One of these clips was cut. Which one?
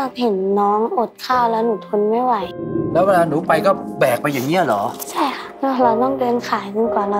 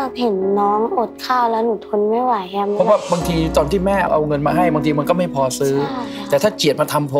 first; 2 cuts; at 2.5 s, 5.0 s

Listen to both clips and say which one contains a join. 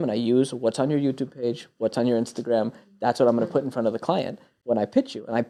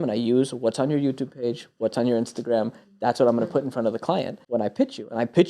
second; 1 cut; at 4.4 s

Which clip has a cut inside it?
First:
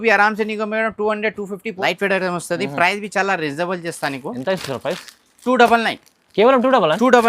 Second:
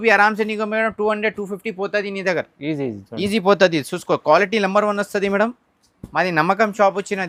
first; 1 cut; at 1.7 s

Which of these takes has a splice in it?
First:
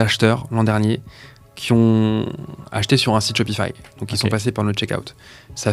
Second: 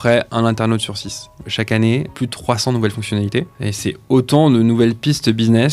second; 3 cuts; at 1.4 s, 2.1 s, 3.5 s

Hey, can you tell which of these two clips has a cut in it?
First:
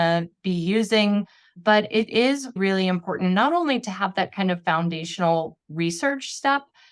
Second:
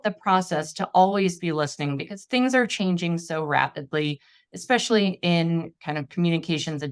first; 2 cuts; at 1.5 s, 2.6 s

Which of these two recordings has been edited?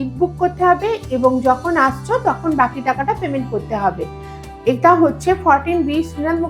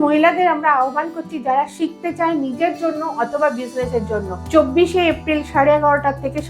second; 1 cut; at 4.4 s

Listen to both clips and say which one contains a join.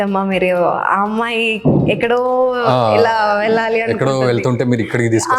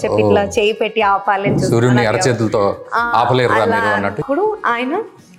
second; 1 cut; at 4.2 s

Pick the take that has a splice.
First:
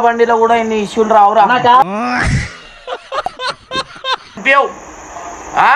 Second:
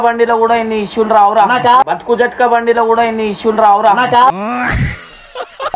first; 2 cuts; at 1.8 s, 4.4 s

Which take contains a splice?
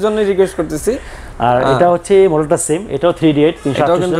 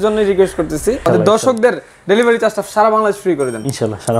second; 1 cut; at 1.0 s

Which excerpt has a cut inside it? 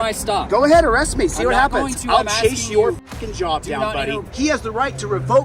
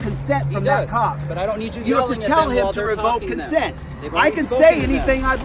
first; 1 cut; at 4.3 s

